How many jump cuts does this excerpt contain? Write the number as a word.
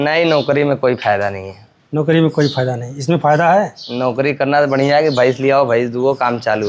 zero